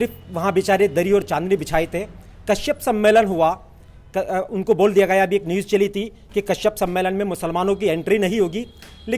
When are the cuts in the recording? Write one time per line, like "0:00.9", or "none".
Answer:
none